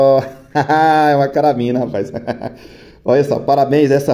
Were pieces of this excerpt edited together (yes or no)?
no